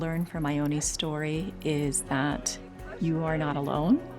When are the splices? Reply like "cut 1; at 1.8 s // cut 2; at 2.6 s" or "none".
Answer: none